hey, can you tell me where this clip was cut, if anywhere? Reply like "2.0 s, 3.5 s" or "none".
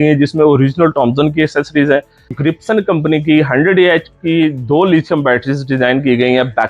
2.4 s

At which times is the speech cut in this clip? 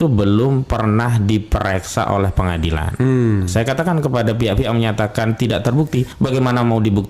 6.1 s

